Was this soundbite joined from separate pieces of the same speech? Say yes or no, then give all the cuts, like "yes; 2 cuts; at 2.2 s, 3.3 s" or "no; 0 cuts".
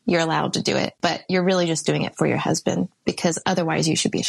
no; 0 cuts